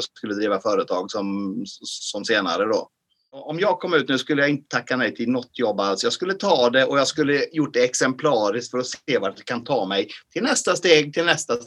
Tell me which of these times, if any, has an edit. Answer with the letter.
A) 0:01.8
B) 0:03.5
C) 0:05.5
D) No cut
B